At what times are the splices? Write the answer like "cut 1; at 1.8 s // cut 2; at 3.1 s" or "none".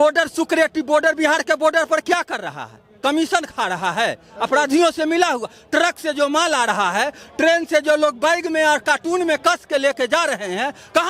none